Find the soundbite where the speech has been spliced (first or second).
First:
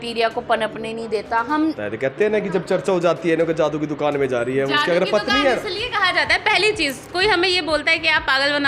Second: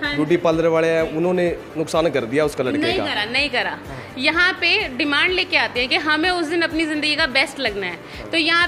first